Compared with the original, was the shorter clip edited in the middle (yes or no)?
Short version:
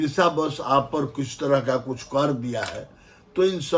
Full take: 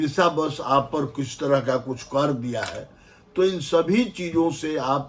no